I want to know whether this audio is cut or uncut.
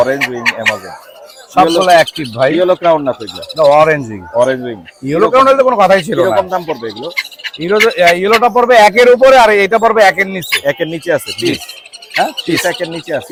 uncut